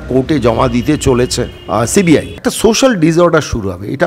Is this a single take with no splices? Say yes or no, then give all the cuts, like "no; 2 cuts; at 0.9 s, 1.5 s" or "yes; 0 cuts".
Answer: no; 2 cuts; at 1.6 s, 2.3 s